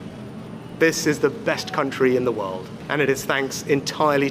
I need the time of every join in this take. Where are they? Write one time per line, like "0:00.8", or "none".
0:02.7